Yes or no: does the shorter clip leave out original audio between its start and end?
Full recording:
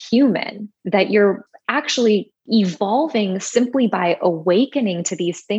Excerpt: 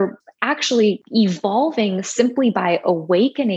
yes